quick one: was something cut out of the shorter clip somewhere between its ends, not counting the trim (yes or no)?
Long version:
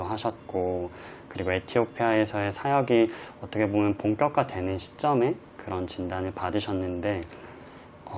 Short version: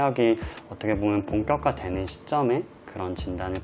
no